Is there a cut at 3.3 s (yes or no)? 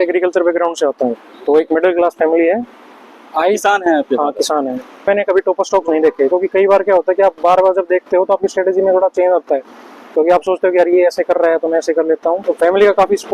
no